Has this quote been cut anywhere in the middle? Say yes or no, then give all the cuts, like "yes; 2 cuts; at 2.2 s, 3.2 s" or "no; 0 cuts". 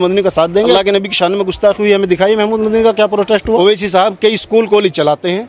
yes; 2 cuts; at 0.7 s, 3.6 s